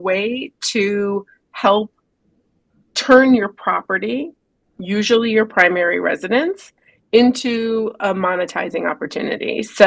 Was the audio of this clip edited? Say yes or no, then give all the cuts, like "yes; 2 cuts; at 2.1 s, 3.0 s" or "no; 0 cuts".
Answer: no; 0 cuts